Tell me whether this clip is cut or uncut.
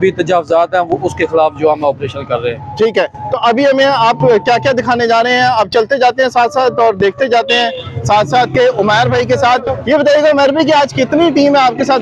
uncut